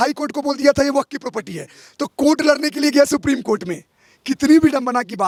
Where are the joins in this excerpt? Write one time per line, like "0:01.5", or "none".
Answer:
none